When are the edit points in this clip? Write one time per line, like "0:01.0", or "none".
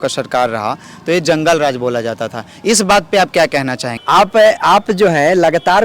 0:03.9